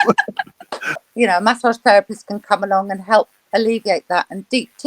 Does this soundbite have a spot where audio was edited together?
yes; 1 cut; at 0.9 s

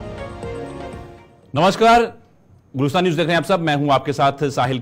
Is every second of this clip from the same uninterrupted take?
yes; 0 cuts

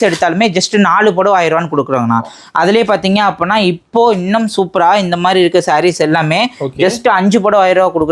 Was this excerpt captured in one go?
yes; 0 cuts

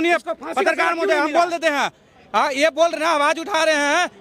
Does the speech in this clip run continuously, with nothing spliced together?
yes; 0 cuts

